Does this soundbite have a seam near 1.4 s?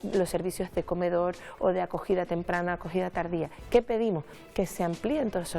no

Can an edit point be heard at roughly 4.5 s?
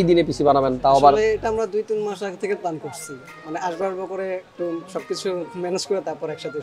no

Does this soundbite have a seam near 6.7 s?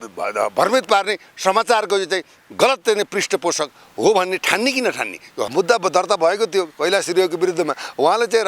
no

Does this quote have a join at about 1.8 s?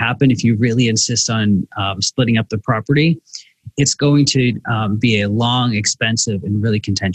no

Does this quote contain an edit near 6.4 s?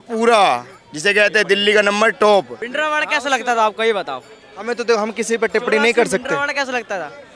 no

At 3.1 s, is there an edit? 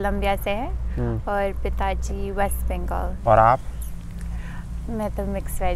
yes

